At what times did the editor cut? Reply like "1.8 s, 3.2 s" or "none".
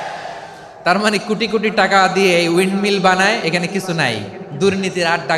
none